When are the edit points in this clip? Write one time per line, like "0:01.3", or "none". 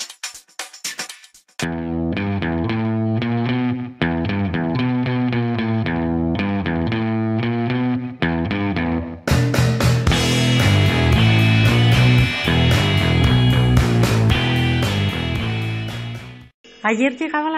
none